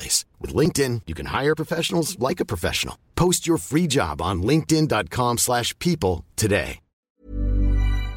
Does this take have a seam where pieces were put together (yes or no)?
yes